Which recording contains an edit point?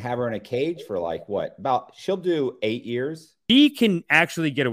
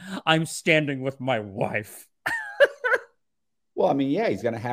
first; 1 cut; at 3.3 s

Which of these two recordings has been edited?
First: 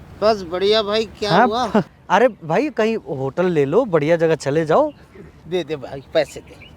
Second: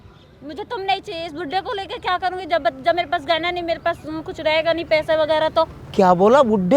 first; 1 cut; at 2.0 s

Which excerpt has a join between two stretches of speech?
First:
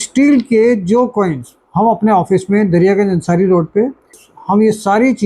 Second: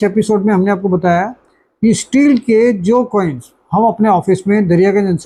first; 1 cut; at 4.2 s

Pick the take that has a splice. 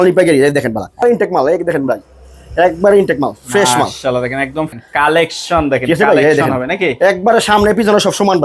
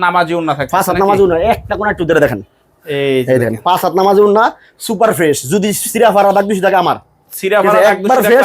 first; 2 cuts; at 1.0 s, 4.7 s

